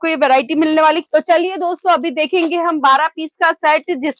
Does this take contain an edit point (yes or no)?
yes